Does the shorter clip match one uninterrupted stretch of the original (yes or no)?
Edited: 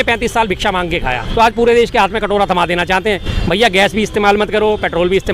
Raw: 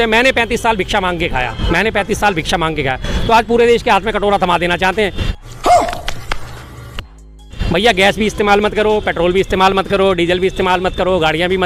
no